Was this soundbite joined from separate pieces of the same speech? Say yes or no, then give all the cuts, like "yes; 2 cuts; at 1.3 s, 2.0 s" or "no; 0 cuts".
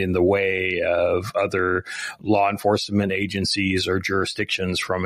no; 0 cuts